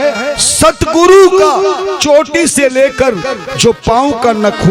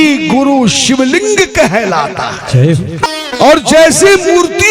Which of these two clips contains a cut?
second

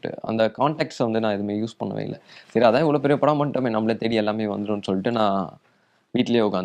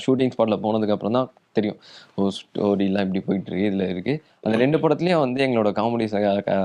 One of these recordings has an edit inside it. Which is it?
second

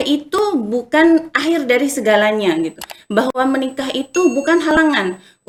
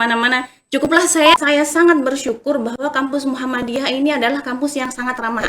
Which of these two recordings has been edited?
second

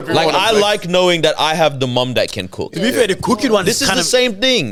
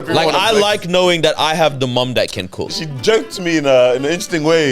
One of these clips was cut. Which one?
second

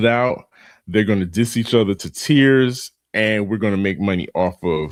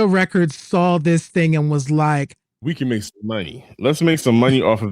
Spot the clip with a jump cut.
second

